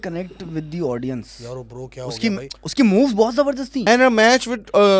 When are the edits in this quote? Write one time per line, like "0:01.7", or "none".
0:02.6
0:03.9